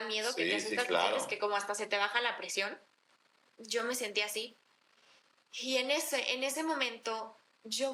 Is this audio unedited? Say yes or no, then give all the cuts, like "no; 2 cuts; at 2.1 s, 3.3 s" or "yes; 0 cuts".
yes; 0 cuts